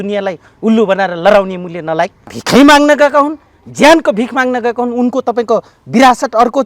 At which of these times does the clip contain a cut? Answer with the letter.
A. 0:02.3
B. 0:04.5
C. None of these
A